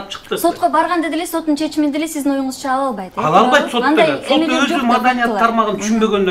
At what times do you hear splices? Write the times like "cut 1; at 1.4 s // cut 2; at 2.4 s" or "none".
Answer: none